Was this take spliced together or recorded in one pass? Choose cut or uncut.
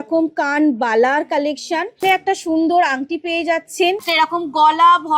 cut